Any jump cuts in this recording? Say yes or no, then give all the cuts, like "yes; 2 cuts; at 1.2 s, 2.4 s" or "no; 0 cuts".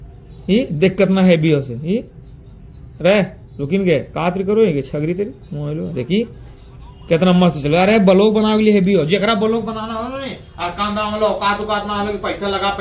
no; 0 cuts